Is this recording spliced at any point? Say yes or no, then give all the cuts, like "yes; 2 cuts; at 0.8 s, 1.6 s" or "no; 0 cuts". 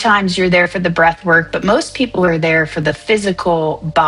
no; 0 cuts